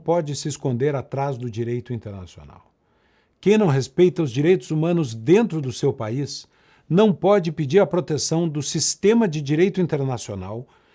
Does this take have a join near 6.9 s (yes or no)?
no